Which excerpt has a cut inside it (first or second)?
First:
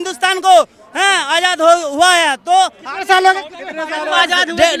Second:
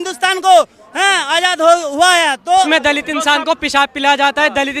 second